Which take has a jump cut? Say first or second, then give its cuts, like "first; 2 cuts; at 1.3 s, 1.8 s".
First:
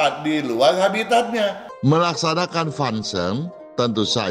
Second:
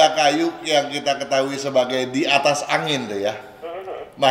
first; 1 cut; at 1.7 s